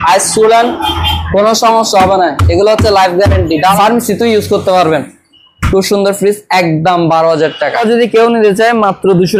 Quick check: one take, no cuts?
no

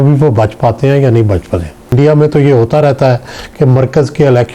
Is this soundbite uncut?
no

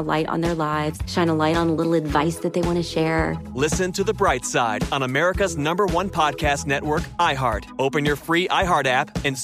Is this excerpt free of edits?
yes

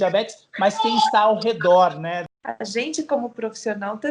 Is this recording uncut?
no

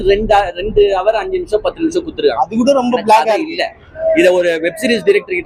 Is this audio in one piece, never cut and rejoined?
yes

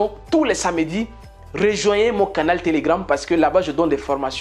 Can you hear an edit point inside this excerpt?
no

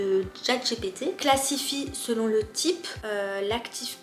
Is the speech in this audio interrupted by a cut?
yes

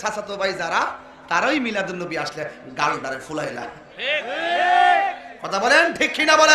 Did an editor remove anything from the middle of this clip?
no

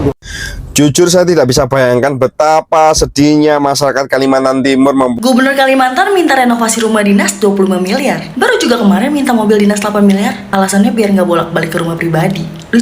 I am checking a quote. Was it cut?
yes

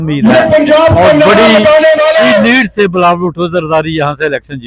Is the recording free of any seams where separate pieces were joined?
yes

